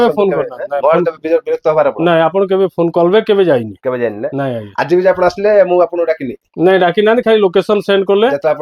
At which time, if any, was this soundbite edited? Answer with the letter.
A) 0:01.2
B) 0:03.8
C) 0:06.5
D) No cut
D